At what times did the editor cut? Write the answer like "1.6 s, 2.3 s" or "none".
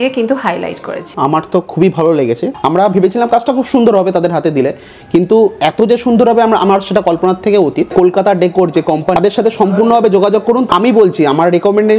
1.0 s, 2.4 s, 7.9 s, 9.2 s, 10.7 s